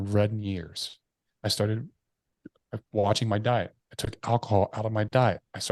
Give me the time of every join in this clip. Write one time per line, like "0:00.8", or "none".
none